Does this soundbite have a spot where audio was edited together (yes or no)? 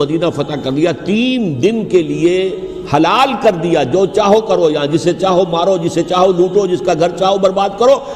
no